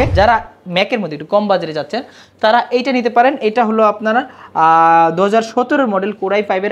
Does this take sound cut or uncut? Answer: uncut